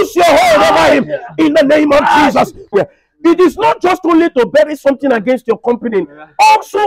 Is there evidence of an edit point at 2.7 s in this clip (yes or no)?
yes